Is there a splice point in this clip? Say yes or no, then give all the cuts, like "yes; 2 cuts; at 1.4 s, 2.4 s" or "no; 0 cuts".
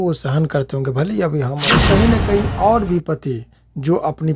yes; 1 cut; at 1.8 s